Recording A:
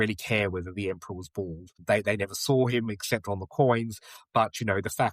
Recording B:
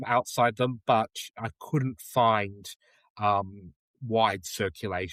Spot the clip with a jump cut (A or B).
A